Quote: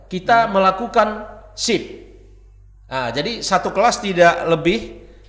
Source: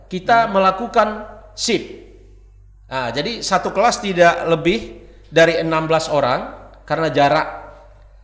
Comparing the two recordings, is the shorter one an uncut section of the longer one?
yes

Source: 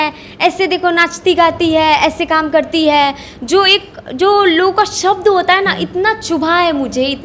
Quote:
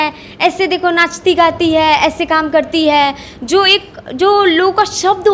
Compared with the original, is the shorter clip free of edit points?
yes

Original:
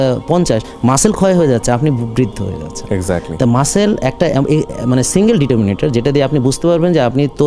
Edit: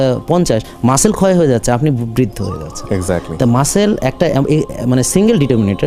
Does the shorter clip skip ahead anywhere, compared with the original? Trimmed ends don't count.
no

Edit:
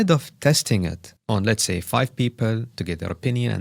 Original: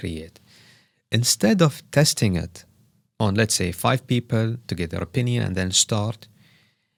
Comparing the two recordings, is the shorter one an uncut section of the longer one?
no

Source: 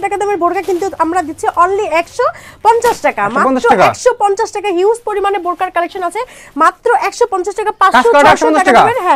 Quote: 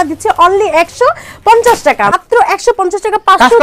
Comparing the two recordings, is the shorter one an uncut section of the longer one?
no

